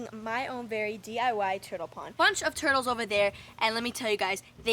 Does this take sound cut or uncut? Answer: cut